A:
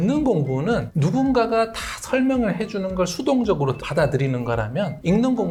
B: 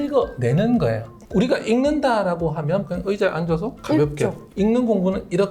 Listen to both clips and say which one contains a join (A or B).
B